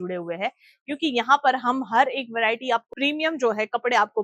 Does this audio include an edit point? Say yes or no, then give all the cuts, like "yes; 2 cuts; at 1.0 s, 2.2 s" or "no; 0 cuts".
no; 0 cuts